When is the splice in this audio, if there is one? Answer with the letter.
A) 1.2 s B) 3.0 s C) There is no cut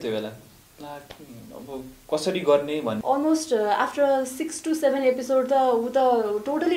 B